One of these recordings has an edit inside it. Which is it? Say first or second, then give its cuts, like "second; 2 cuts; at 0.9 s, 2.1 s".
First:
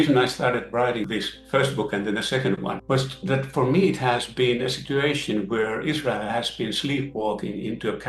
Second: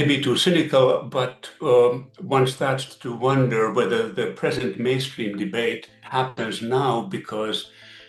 first; 2 cuts; at 1.0 s, 2.8 s